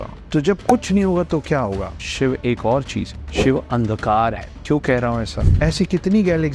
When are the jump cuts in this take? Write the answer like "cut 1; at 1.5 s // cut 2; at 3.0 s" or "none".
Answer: cut 1; at 2.0 s // cut 2; at 5.4 s